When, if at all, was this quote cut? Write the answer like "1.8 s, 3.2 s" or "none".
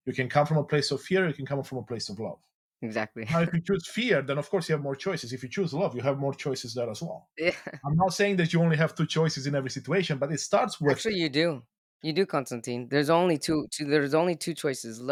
none